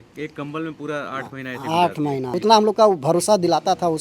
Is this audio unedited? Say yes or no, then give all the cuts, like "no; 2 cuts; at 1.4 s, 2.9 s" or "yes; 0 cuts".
no; 1 cut; at 2.3 s